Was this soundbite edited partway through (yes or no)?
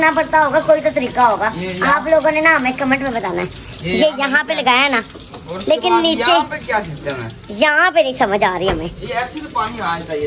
no